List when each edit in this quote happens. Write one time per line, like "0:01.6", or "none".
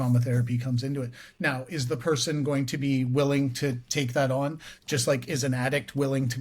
none